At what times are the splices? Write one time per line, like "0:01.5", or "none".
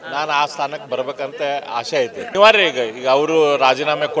0:02.3